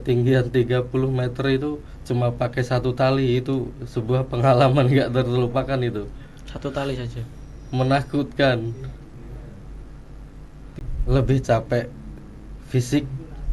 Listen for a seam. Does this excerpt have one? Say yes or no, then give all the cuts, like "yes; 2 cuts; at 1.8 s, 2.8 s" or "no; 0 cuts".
yes; 1 cut; at 10.8 s